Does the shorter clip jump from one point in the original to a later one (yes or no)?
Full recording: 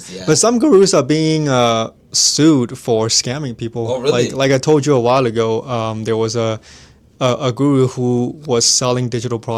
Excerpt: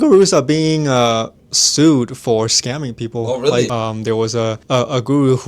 yes